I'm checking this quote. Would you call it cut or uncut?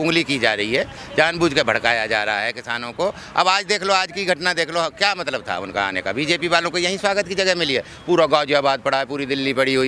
uncut